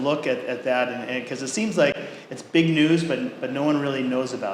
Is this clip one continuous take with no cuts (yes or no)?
yes